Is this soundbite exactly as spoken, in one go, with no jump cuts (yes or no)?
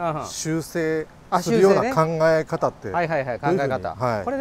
yes